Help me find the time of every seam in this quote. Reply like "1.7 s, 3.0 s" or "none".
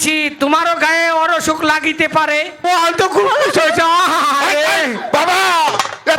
2.6 s

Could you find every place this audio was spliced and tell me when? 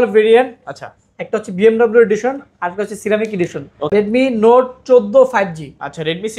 3.9 s

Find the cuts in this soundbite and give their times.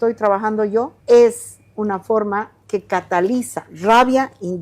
0.9 s, 3.6 s

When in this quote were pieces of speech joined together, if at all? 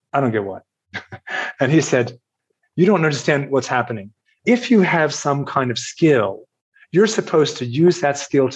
4.4 s

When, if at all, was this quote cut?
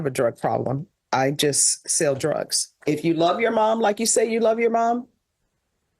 2.8 s

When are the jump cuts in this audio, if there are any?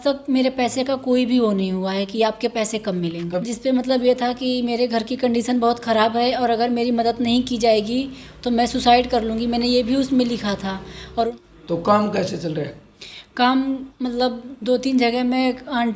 3.4 s, 11.2 s

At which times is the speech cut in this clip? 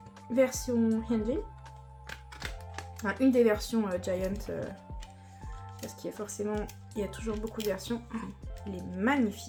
none

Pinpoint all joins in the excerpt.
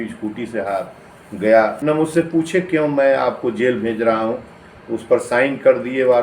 1.8 s

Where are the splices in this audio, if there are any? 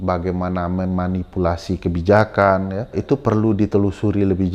3.0 s

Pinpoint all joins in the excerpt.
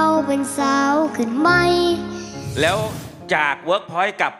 2.4 s

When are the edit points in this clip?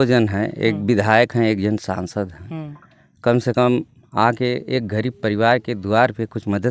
none

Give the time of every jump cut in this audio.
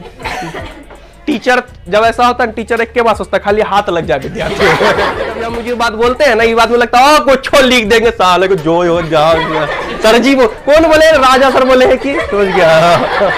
5.6 s

